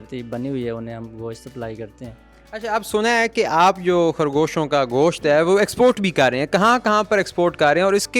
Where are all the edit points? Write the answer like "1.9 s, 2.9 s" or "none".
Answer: none